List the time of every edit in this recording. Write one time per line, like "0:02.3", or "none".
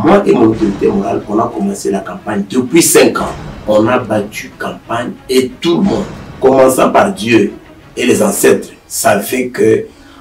0:03.5